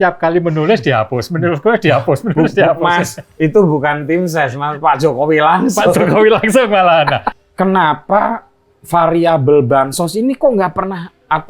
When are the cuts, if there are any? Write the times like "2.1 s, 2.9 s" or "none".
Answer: 7.4 s